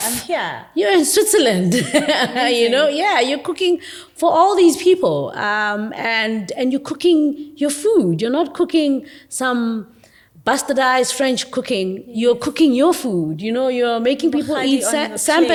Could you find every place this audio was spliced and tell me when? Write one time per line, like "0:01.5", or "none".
none